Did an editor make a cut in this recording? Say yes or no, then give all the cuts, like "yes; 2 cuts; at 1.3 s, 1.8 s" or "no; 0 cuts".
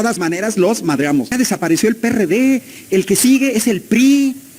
yes; 1 cut; at 1.3 s